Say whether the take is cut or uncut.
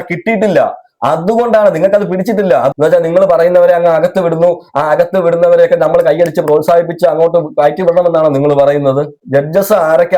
cut